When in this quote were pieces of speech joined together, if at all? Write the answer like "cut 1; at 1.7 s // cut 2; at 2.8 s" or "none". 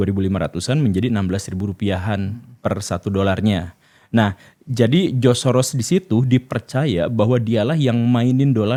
none